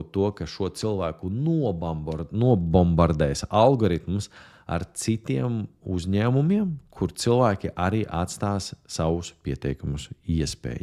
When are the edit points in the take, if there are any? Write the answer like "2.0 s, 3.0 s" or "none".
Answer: none